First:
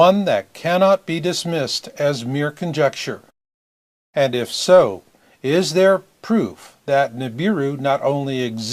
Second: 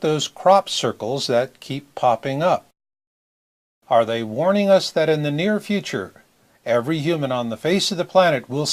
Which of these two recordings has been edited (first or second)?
second